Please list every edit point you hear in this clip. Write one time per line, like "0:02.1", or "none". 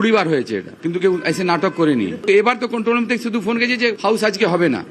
0:04.0